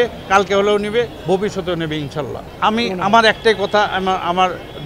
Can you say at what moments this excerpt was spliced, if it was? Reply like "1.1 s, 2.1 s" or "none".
2.4 s

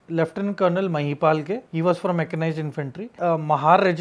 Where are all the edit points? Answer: 1.7 s, 3.1 s

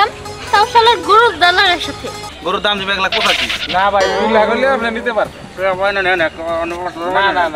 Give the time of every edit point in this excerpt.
2.3 s

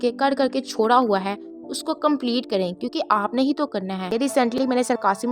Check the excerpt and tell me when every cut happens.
4.2 s

